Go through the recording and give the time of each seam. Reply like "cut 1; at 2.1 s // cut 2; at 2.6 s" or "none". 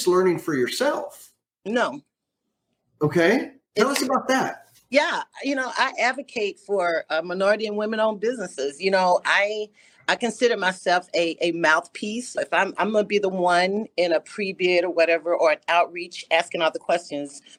none